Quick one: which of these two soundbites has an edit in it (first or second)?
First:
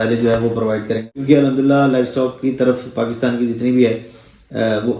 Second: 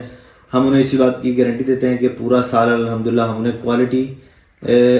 first